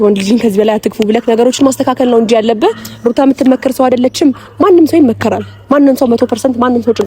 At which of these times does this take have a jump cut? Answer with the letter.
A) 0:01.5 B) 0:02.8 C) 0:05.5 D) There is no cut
D